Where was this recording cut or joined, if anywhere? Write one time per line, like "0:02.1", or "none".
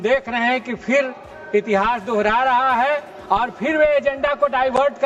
none